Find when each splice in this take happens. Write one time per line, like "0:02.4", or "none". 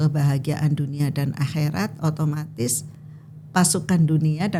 none